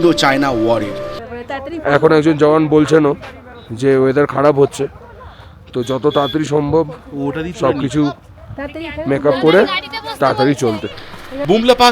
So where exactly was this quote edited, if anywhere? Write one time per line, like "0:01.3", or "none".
0:01.2